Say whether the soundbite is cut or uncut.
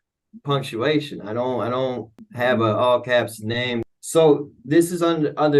cut